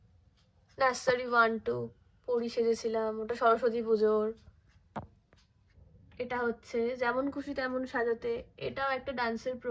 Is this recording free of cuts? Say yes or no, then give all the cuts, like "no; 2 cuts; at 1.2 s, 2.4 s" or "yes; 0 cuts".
yes; 0 cuts